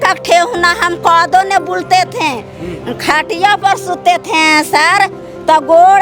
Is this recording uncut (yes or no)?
yes